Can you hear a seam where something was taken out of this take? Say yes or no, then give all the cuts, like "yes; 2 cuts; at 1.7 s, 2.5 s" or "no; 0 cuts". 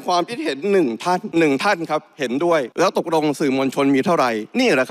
yes; 2 cuts; at 1.3 s, 2.7 s